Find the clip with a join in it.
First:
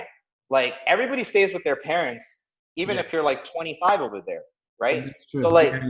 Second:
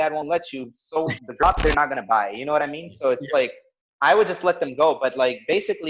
second; 1 cut; at 1.4 s

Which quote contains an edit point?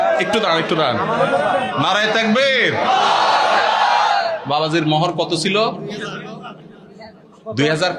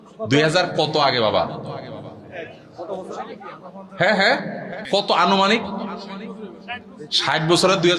second; 1 cut; at 4.8 s

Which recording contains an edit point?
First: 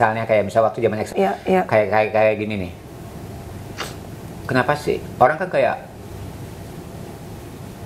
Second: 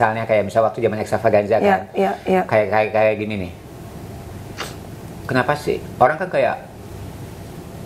first; 1 cut; at 1.1 s

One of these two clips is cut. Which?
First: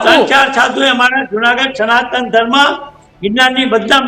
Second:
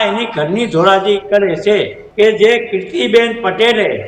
second; 1 cut; at 2.0 s

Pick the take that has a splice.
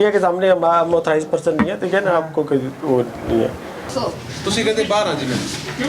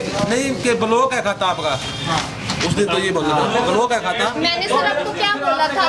first; 1 cut; at 3.9 s

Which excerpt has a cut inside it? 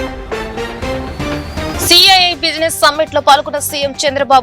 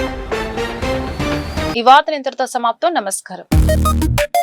first; 1 cut; at 1.7 s

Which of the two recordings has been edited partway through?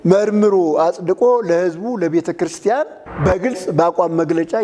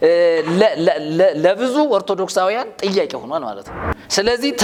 first; 1 cut; at 2.8 s

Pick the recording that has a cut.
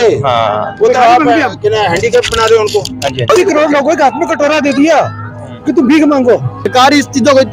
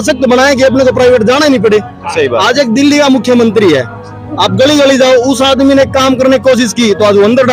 first; 2 cuts; at 3.3 s, 6.7 s

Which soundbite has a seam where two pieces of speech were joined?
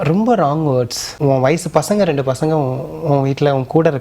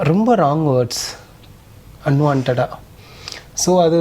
first; 1 cut; at 1.0 s

